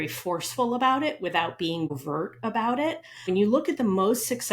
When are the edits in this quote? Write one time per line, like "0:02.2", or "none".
0:01.9
0:03.3